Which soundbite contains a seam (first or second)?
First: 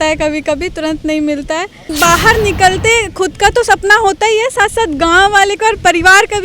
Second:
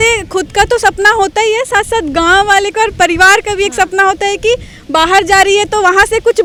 first